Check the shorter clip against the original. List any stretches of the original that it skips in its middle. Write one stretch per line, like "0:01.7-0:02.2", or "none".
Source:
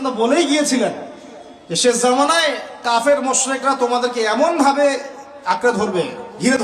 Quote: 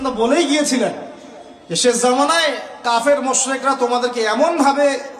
none